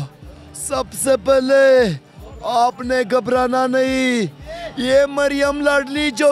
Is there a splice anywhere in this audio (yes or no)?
no